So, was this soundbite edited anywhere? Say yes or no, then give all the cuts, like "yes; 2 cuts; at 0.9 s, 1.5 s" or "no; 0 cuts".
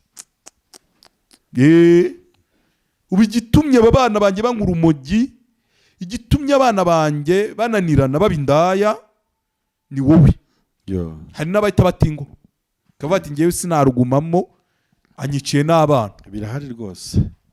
no; 0 cuts